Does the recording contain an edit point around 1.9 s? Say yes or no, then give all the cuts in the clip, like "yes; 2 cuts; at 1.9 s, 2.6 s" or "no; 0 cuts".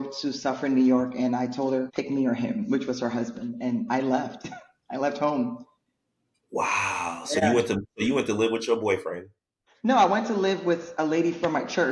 yes; 1 cut; at 1.9 s